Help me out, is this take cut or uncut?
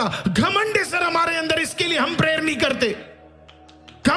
uncut